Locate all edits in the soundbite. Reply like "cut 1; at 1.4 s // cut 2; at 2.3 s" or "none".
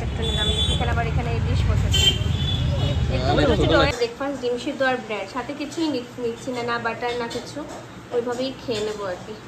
cut 1; at 3.9 s